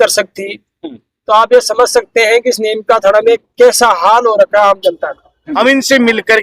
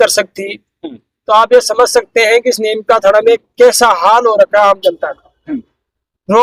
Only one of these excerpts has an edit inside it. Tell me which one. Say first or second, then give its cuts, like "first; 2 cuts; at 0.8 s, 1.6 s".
first; 1 cut; at 5.3 s